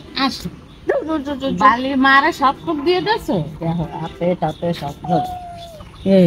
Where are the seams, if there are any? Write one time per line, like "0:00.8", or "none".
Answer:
none